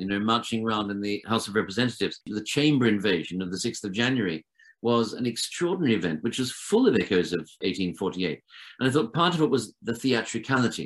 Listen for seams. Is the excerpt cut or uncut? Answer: cut